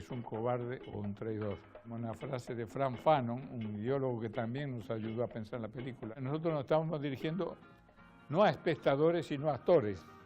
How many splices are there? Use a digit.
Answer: 1